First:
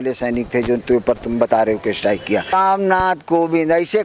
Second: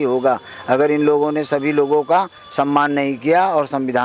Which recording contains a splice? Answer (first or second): first